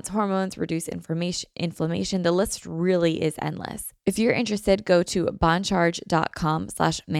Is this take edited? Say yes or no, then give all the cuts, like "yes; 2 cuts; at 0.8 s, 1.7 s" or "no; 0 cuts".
yes; 1 cut; at 3.9 s